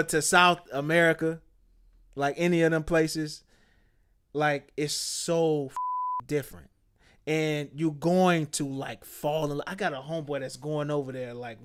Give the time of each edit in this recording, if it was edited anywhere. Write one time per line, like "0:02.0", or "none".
none